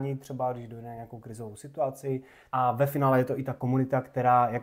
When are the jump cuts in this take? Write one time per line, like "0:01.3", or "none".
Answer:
0:02.4